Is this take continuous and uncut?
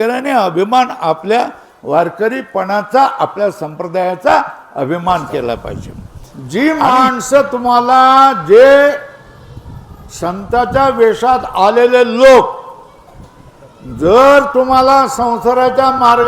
no; 1 cut; at 5.7 s

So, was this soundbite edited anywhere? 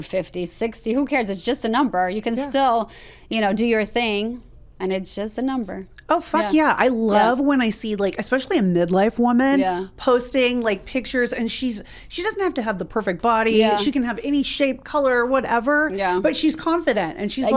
no; 0 cuts

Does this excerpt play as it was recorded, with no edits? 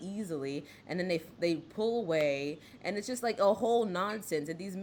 yes; 0 cuts

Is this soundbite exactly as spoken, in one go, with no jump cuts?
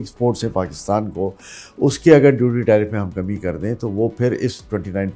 yes; 0 cuts

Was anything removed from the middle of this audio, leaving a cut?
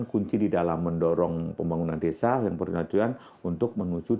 no; 0 cuts

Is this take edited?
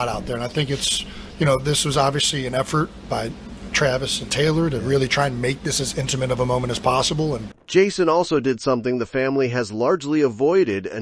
no; 0 cuts

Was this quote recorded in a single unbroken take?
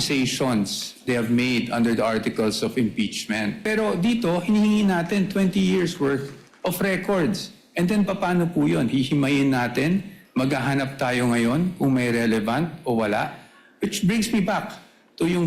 no; 1 cut; at 3.6 s

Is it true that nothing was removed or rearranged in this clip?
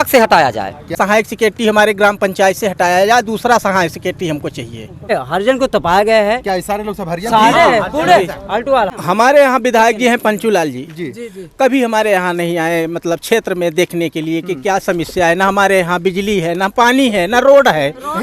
no; 3 cuts; at 0.9 s, 5.1 s, 8.9 s

